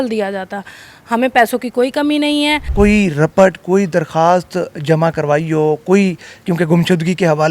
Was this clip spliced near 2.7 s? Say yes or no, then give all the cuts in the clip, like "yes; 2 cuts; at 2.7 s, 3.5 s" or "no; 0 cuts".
yes; 1 cut; at 2.7 s